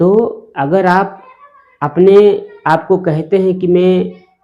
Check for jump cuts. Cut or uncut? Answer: uncut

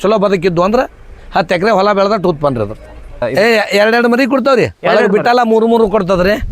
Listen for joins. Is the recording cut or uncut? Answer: cut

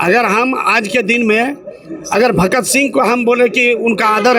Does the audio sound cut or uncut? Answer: uncut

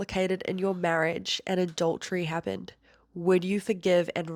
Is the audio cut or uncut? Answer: uncut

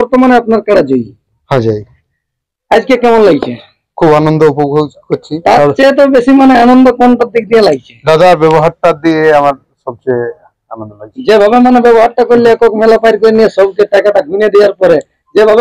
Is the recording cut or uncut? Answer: uncut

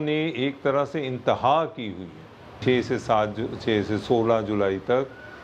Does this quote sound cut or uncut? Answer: cut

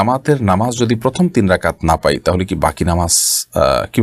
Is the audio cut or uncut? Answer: uncut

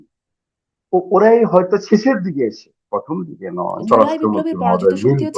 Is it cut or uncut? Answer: cut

